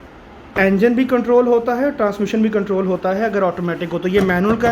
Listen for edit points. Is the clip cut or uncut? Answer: uncut